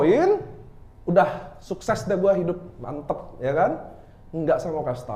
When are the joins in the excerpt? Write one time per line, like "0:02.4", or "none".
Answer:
none